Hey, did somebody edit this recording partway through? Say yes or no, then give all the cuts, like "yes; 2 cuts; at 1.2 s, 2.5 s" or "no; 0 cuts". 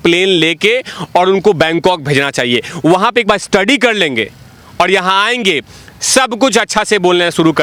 no; 0 cuts